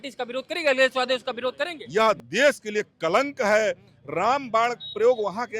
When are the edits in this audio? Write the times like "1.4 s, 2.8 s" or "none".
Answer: 1.7 s